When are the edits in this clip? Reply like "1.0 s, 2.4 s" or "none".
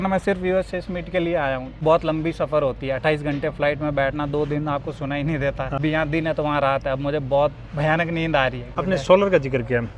1.8 s, 5.8 s, 8.6 s

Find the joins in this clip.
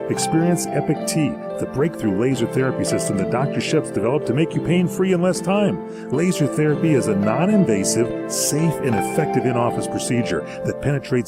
none

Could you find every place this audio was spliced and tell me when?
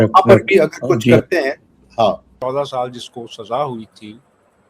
2.3 s

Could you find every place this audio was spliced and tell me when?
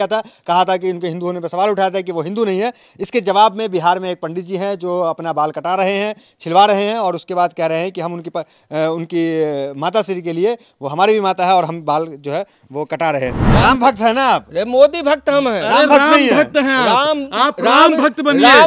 13.3 s

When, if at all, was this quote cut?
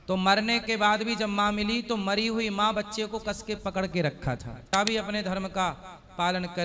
4.7 s

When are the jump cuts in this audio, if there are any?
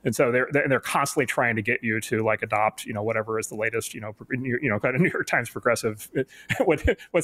none

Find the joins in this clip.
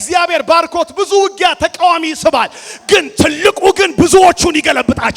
none

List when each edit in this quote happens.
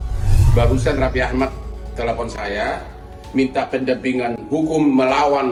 none

